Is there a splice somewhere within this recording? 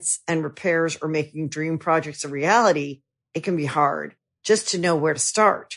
no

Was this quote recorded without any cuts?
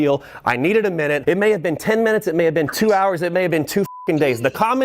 no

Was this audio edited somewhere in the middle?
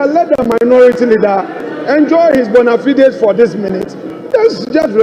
no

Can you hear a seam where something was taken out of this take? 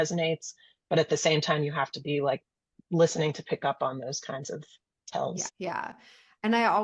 yes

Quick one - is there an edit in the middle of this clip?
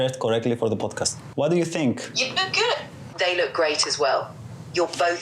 yes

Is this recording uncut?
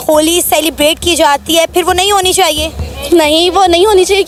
yes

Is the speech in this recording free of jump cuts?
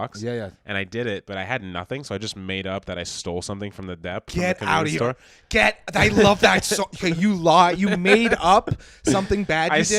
yes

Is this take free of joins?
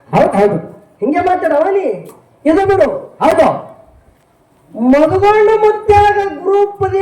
yes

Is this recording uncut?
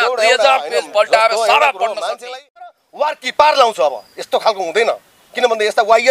no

